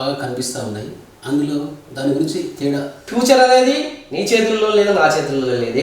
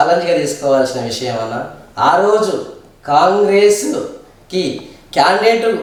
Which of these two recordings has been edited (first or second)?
first